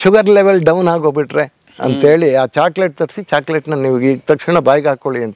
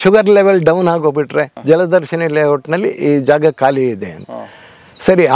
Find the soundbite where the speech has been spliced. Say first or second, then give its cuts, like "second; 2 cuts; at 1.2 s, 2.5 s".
second; 1 cut; at 1.5 s